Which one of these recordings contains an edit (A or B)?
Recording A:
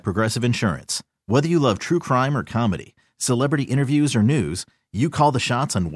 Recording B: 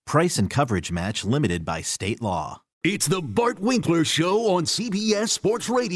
B